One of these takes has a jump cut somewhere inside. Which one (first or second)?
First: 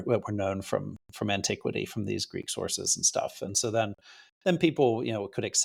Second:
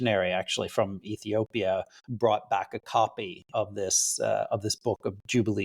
second